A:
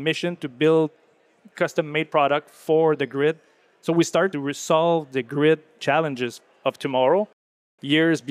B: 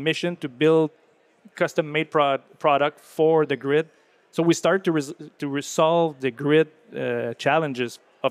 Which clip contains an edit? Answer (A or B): A